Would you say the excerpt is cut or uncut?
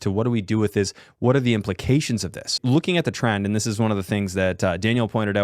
cut